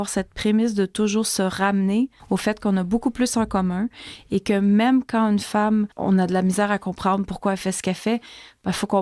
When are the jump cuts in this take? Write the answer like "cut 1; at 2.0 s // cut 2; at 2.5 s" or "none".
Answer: cut 1; at 2.2 s // cut 2; at 5.9 s